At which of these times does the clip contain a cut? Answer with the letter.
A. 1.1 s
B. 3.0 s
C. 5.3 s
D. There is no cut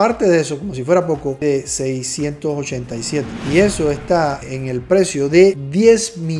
D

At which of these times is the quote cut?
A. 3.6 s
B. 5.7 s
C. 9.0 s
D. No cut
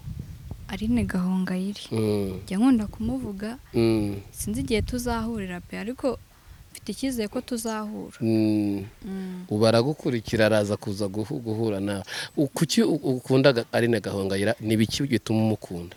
D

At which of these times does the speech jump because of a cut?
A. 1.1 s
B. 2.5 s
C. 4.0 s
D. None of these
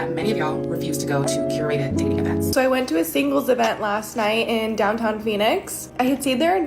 B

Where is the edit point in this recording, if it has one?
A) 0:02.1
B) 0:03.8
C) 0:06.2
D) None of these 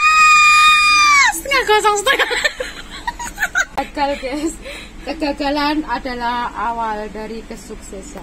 B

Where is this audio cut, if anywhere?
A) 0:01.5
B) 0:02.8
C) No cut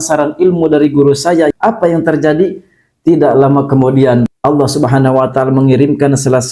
A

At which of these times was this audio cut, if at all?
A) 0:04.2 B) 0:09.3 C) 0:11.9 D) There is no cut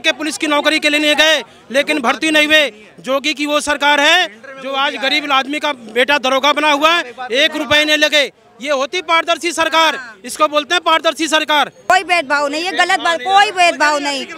C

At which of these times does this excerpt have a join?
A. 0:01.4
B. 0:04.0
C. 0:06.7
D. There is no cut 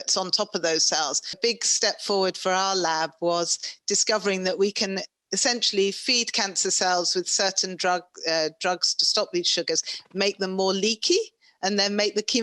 A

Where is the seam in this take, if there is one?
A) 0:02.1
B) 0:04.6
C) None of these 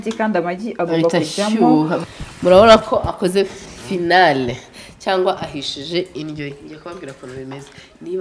A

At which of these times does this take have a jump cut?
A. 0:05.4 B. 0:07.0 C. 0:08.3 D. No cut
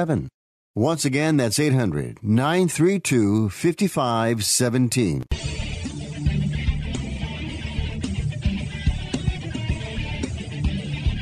A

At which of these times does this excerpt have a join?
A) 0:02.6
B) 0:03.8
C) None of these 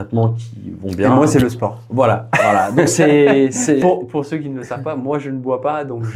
B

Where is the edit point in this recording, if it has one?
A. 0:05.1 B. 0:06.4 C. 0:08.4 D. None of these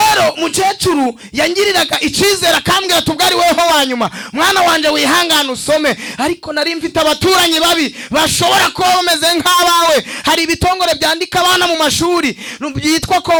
D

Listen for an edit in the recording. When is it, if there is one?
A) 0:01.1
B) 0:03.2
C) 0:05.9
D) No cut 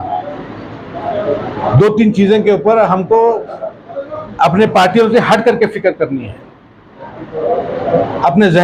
D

